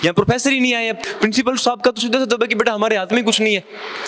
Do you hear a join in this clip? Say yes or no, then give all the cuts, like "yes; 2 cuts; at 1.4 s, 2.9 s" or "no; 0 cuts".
yes; 1 cut; at 1.0 s